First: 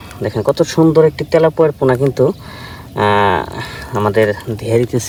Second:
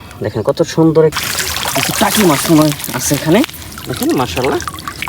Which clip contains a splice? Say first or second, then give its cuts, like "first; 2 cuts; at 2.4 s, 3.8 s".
second; 1 cut; at 1.2 s